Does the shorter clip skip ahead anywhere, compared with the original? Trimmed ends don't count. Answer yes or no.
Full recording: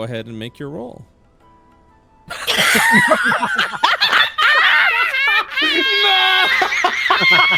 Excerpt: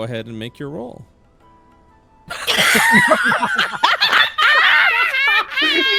no